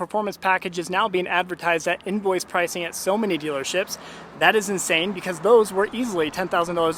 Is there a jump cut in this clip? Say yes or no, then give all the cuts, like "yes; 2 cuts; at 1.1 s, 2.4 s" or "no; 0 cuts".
no; 0 cuts